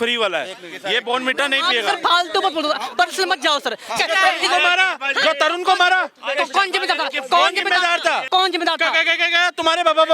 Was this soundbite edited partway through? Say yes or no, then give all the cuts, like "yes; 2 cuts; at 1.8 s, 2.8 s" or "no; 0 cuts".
yes; 2 cuts; at 4.0 s, 8.3 s